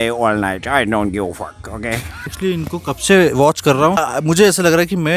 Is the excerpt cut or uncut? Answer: cut